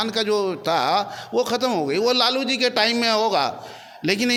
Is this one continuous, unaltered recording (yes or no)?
yes